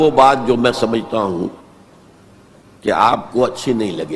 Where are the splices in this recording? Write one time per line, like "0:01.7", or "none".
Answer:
none